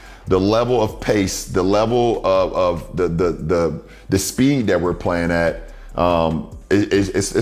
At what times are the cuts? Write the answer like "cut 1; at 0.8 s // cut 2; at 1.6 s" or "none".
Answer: none